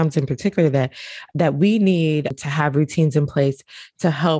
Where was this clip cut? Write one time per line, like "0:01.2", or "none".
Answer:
0:02.4